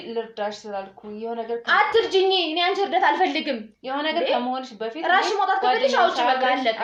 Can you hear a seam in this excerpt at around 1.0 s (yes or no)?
no